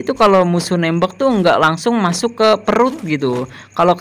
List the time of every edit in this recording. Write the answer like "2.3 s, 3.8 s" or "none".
none